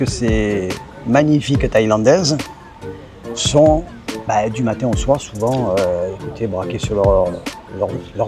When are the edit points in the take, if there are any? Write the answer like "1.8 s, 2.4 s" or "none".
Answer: none